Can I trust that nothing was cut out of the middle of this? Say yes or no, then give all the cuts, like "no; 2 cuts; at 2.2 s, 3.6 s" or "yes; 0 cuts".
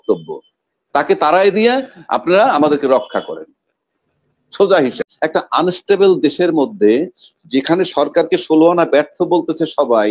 no; 1 cut; at 5.1 s